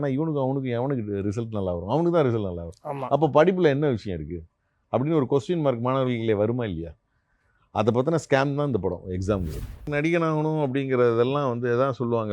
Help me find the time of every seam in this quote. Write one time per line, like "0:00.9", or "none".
0:09.8

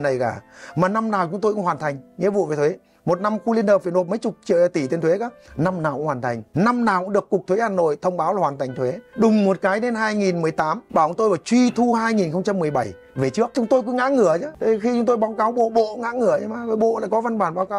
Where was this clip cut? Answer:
0:06.4
0:09.0
0:10.8
0:13.5
0:14.5

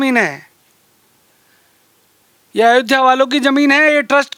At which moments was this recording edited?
none

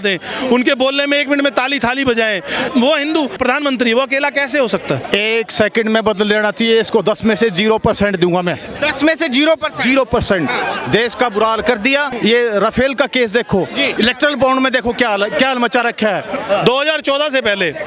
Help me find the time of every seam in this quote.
0:02.7
0:03.4
0:05.0
0:12.1
0:13.9
0:16.4

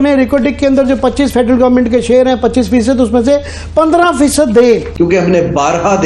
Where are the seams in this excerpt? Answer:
0:04.9

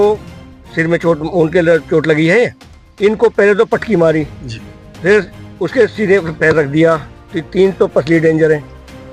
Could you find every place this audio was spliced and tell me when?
none

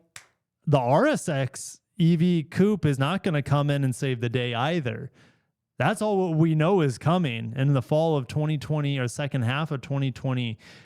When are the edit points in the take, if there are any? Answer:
none

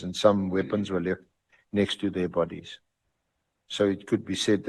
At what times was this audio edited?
none

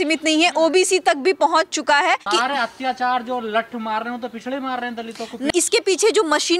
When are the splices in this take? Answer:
0:02.3
0:05.5

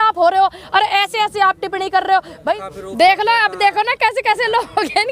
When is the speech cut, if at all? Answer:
0:02.6

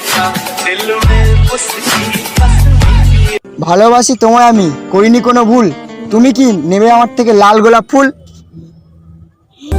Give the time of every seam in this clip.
0:03.5

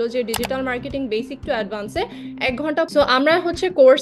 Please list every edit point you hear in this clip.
0:02.9

